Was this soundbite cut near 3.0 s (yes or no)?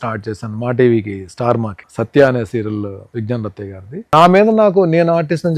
yes